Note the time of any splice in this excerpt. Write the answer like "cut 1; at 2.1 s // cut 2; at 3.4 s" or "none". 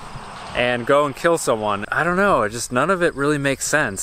cut 1; at 1.8 s